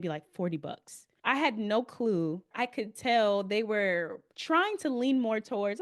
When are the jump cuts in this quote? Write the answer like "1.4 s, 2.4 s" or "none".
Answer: 2.5 s